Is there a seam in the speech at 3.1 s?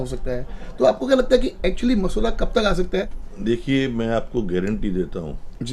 yes; 1 cut; at 3.1 s

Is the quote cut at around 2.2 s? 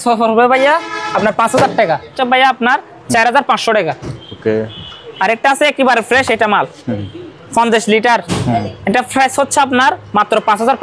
yes; 1 cut; at 2.2 s

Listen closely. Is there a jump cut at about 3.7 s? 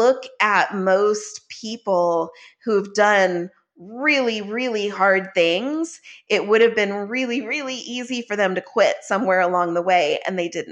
no; 0 cuts

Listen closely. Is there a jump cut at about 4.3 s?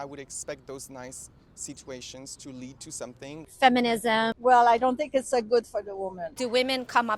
yes; 3 cuts; at 3.5 s, 4.3 s, 6.2 s

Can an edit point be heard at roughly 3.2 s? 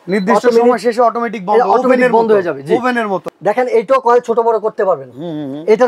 yes; 1 cut; at 3.2 s

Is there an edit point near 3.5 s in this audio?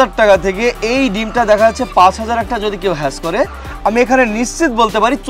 no; 0 cuts

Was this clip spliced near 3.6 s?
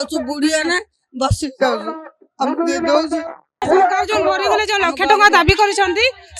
yes; 1 cut; at 3.6 s

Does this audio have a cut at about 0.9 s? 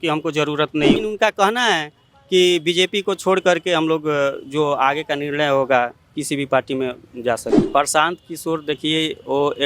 yes; 2 cuts; at 0.9 s, 7.5 s

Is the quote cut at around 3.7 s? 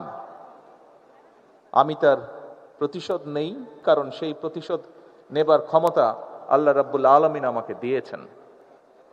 yes; 1 cut; at 3.7 s

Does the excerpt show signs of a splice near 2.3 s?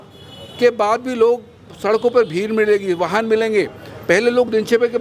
no; 0 cuts

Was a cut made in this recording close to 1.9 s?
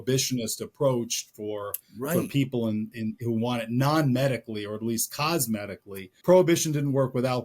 no; 1 cut; at 6.1 s

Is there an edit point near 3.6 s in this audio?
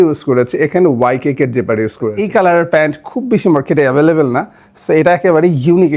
no; 1 cut; at 2.2 s

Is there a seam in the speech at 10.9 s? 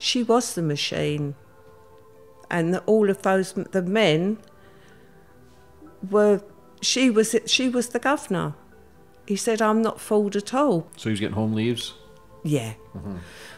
yes; 1 cut; at 10.9 s

